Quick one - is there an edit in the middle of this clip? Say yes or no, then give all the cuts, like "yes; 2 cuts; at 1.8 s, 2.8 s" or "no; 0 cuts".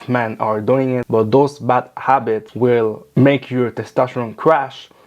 yes; 2 cuts; at 1.0 s, 2.5 s